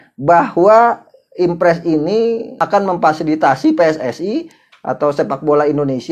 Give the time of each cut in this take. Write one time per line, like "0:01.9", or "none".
0:02.6